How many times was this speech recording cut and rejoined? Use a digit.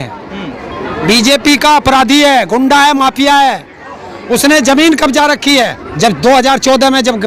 1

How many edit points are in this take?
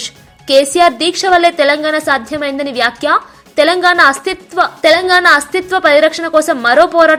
0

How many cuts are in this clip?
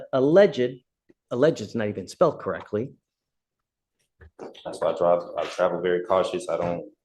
1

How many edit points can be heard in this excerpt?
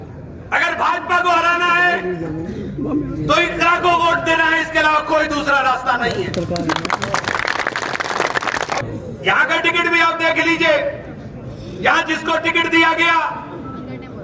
1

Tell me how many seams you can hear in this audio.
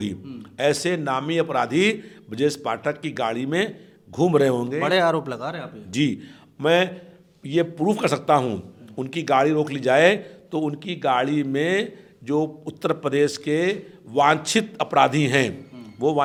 0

